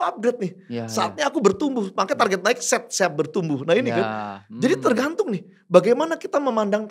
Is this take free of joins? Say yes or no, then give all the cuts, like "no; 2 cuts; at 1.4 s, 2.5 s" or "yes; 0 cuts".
yes; 0 cuts